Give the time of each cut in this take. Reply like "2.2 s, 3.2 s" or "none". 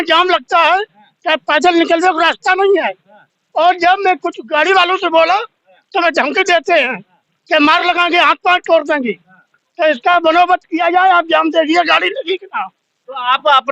none

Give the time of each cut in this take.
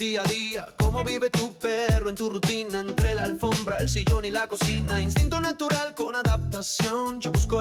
none

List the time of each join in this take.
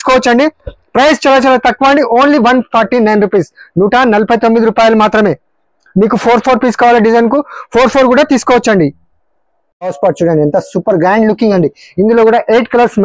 9.9 s

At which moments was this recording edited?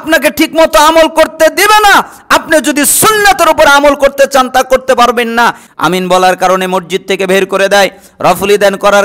5.7 s

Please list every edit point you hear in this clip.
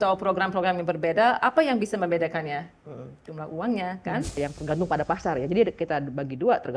4.4 s

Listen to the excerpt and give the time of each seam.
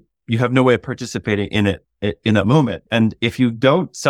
2.8 s

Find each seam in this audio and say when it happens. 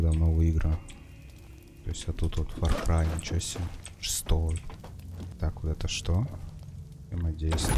5.2 s

